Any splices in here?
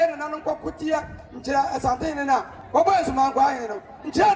yes; 1 cut; at 2.6 s

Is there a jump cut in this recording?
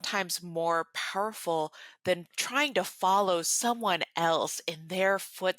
yes; 1 cut; at 2.3 s

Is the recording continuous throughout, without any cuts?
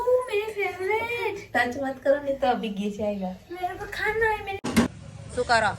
no; 1 cut; at 4.7 s

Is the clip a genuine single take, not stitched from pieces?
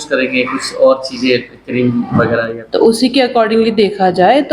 no; 1 cut; at 2.5 s

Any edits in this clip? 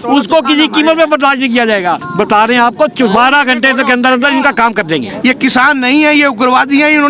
yes; 2 cuts; at 2.0 s, 5.1 s

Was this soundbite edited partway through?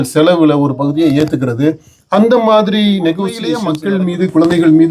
yes; 1 cut; at 3.7 s

